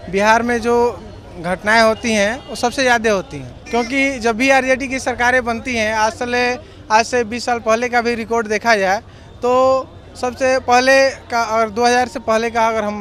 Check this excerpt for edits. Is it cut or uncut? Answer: uncut